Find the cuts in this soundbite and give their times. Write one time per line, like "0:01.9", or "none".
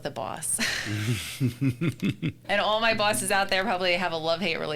0:02.4